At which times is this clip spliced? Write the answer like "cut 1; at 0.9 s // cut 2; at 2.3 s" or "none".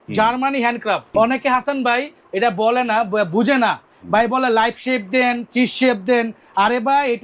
cut 1; at 1.1 s